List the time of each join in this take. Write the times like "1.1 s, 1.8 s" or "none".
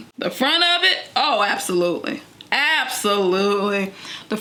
none

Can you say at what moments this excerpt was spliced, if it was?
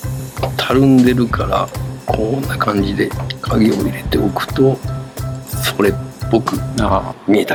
none

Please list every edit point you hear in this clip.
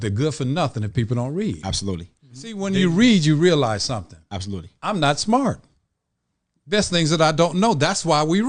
2.6 s

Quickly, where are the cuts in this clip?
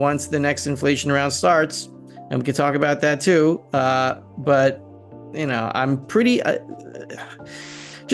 none

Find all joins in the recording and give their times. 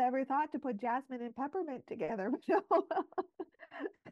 none

